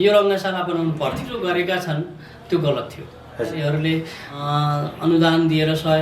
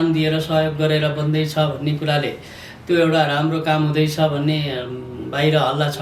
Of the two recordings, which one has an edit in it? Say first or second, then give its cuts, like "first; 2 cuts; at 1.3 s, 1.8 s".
first; 3 cuts; at 1.3 s, 3.6 s, 4.4 s